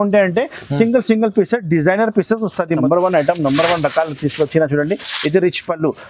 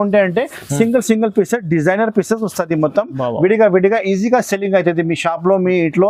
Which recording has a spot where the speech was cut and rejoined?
first; 1 cut; at 2.8 s

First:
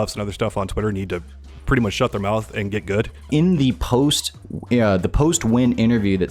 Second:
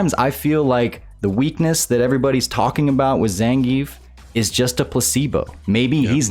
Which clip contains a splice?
first; 1 cut; at 3.3 s

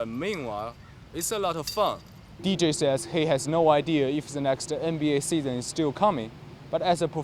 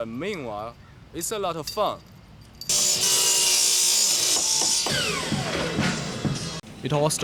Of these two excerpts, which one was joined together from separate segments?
first; 1 cut; at 2.4 s

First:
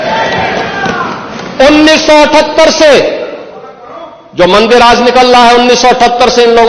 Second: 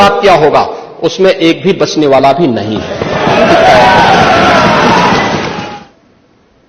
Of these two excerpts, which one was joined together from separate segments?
second; 1 cut; at 5.5 s

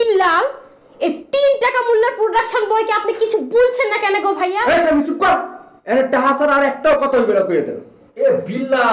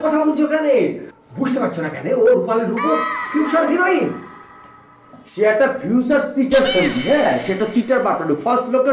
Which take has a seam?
second; 1 cut; at 1.1 s

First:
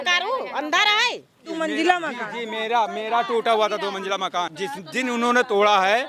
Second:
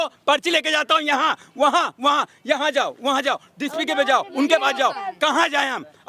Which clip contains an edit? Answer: first; 2 cuts; at 1.5 s, 4.6 s

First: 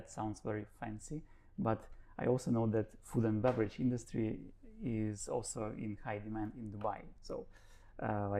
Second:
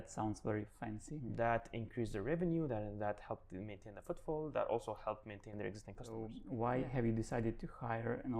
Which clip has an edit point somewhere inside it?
second; 2 cuts; at 1.1 s, 6.3 s

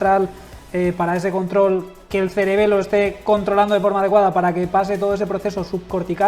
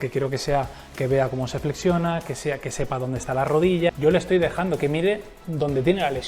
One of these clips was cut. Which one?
second; 1 cut; at 3.9 s

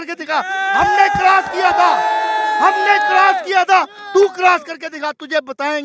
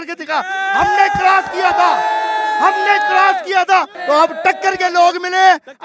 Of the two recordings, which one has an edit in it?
second; 1 cut; at 3.9 s

